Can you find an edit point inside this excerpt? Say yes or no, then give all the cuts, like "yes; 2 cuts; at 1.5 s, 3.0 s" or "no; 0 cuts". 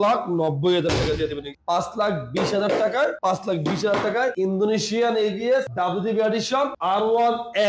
yes; 5 cuts; at 1.5 s, 3.2 s, 4.3 s, 5.7 s, 6.8 s